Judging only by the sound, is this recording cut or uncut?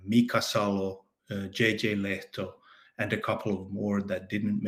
uncut